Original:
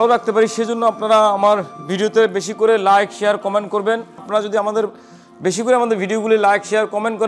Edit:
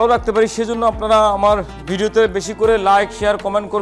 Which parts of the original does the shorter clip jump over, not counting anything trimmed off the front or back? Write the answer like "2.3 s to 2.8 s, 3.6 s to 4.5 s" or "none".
none

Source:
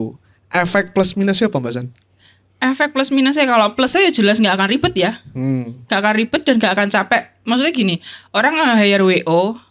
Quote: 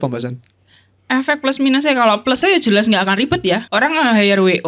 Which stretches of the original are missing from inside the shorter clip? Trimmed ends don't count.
5.2 s to 8.3 s

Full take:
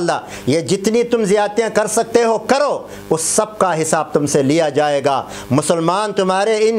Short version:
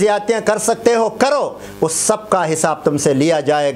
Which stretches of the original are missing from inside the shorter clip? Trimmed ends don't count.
none

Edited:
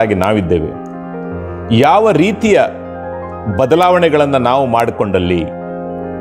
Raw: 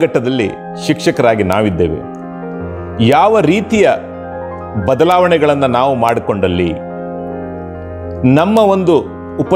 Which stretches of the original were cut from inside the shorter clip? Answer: none

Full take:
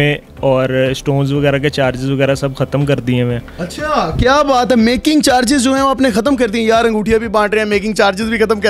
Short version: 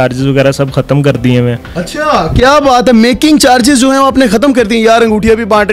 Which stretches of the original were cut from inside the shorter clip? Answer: none

